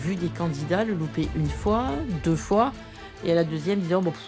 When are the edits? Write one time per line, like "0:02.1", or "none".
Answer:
none